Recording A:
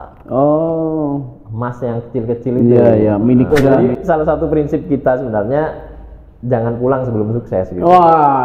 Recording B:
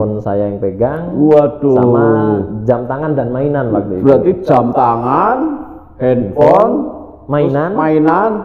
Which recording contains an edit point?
A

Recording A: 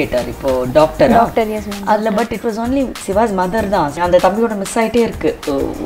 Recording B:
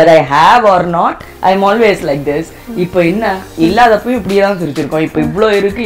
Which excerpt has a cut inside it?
A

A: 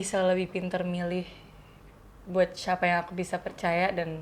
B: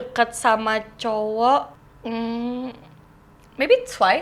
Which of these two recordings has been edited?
B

